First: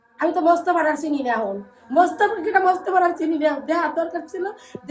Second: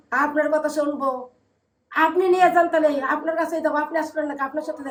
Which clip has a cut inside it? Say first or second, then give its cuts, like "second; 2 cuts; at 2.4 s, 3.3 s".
first; 1 cut; at 1.7 s